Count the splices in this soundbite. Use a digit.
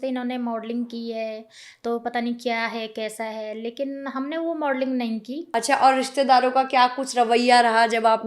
1